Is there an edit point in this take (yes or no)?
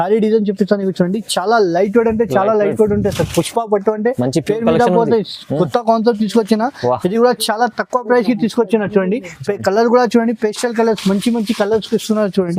no